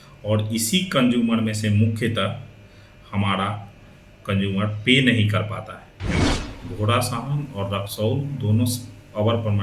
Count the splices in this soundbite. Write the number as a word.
one